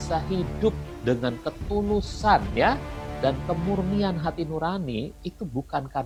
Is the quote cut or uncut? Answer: uncut